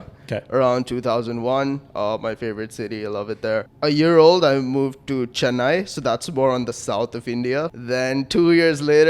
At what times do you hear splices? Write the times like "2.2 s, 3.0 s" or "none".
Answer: 3.7 s, 7.8 s